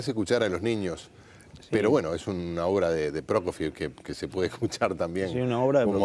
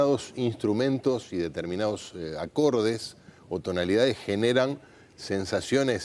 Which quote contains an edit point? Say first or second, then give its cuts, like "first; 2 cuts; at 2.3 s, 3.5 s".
first; 1 cut; at 5.1 s